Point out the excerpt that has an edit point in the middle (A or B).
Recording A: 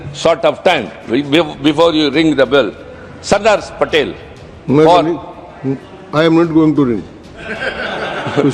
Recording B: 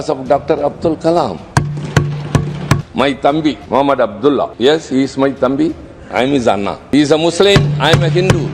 B